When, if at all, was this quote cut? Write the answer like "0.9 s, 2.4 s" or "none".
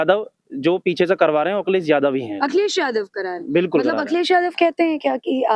none